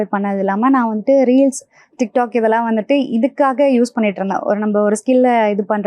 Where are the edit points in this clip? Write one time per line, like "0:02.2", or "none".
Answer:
none